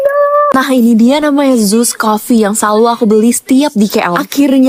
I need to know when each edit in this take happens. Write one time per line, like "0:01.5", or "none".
none